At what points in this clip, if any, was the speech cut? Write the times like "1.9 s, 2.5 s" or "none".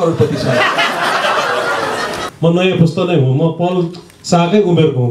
2.2 s